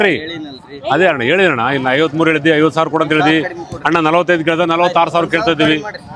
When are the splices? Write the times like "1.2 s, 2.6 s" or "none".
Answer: none